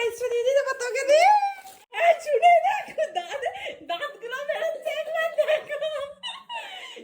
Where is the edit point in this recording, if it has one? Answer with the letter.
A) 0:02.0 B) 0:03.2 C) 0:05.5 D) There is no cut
A